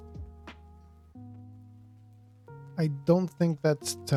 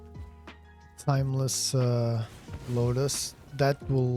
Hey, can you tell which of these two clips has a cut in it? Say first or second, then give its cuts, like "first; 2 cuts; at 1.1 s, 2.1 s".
second; 1 cut; at 0.9 s